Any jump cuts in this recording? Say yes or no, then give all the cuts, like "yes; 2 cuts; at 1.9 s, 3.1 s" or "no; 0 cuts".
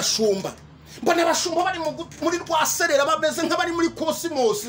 no; 0 cuts